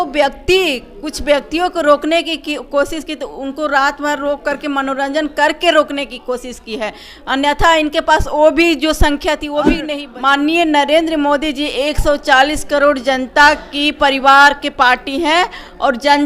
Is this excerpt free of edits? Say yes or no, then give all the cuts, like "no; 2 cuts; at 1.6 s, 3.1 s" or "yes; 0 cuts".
no; 1 cut; at 9.8 s